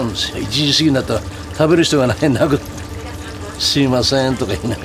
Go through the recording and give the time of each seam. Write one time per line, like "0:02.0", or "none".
none